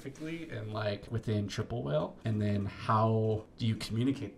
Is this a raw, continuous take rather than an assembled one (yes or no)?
no